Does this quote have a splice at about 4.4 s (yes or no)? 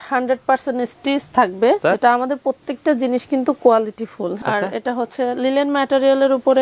yes